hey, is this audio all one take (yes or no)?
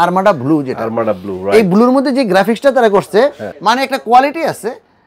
no